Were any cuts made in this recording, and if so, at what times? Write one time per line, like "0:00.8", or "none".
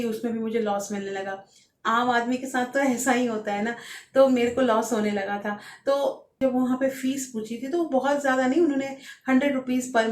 0:06.4

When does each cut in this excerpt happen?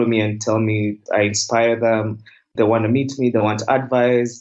0:01.0

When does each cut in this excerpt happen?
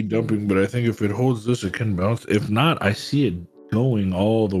none

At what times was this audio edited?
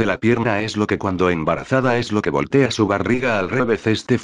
none

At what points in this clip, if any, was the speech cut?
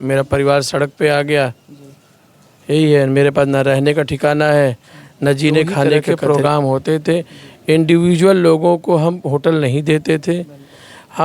0:06.1

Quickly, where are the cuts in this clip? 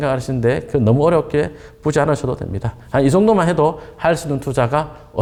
none

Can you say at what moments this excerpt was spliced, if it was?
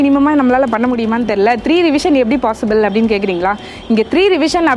none

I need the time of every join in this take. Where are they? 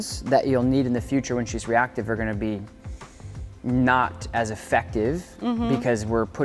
none

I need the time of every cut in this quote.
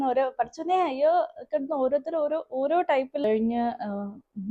0:03.2

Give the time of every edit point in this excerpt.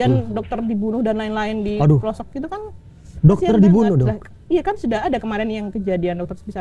none

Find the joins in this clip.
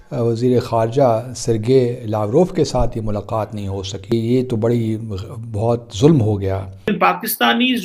0:04.1
0:06.9

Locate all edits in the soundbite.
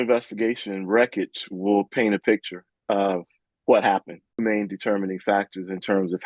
0:04.4

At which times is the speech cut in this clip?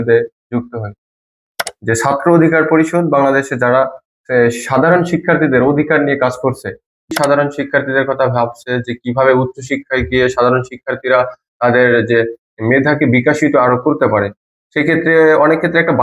0:01.4
0:07.1

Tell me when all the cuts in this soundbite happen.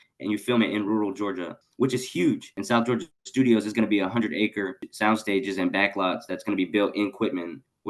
0:02.5
0:04.9

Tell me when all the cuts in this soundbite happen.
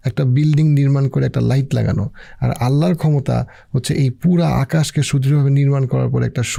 none

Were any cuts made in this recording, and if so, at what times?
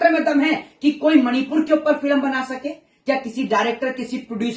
none

